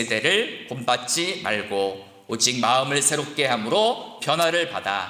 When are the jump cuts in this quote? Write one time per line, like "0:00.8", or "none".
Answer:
none